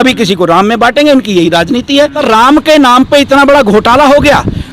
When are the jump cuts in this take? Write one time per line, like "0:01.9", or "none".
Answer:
0:02.2